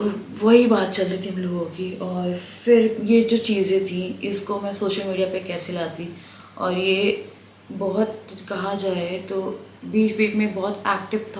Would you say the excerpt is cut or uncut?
uncut